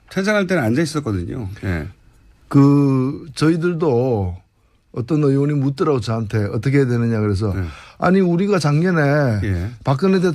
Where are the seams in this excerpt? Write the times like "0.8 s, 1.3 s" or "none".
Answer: 9.4 s